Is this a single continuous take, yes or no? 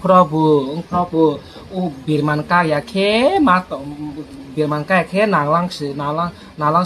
yes